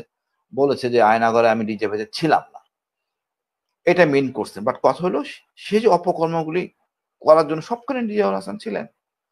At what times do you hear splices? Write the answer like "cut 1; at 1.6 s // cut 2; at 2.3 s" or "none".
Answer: none